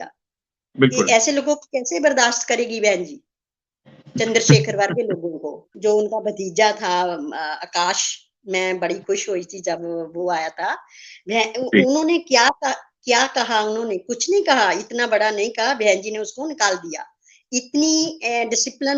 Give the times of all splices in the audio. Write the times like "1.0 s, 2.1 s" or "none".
5.7 s